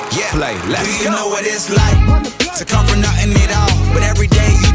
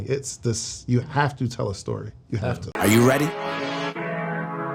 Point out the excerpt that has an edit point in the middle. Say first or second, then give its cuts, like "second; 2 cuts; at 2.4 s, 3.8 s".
second; 1 cut; at 2.7 s